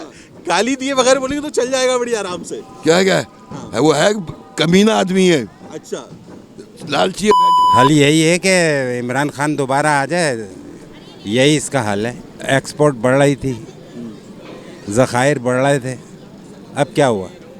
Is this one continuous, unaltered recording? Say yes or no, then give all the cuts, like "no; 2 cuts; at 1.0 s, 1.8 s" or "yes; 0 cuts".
no; 2 cuts; at 7.8 s, 12.3 s